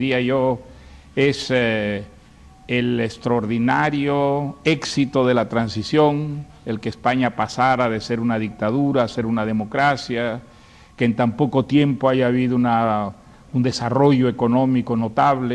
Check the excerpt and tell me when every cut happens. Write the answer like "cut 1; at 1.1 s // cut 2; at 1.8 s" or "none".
cut 1; at 7.2 s